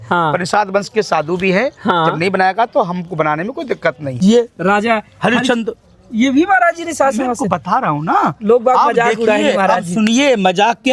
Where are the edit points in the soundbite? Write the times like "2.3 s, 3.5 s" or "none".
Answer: 4.1 s